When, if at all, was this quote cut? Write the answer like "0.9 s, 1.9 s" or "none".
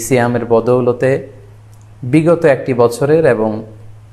none